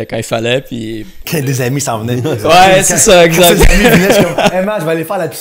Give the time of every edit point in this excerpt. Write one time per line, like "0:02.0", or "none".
none